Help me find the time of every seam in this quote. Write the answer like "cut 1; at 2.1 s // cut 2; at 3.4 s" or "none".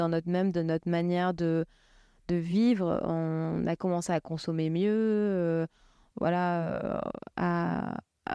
none